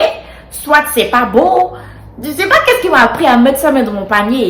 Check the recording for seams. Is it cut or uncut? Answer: uncut